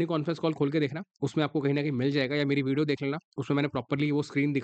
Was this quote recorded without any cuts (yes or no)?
yes